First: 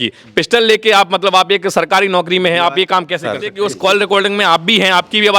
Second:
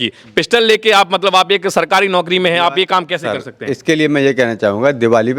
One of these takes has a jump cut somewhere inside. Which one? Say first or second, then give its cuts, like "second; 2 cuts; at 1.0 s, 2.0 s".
first; 1 cut; at 3.5 s